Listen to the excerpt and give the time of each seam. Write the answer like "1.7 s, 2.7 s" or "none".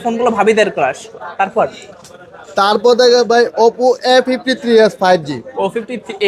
none